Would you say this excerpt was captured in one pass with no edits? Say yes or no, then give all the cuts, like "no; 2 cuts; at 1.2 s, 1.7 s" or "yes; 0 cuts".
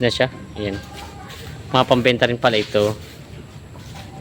yes; 0 cuts